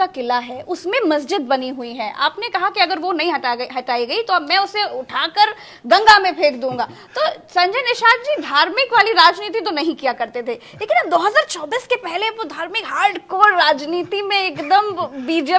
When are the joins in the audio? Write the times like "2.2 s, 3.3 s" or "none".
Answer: none